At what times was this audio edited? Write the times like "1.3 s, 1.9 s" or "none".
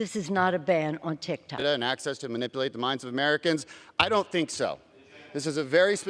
1.6 s